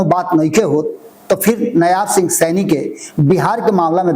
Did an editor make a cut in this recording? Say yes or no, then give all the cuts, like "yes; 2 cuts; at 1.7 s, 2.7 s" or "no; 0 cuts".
no; 0 cuts